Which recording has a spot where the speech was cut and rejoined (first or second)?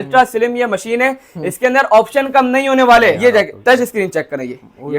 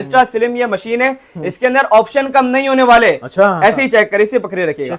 first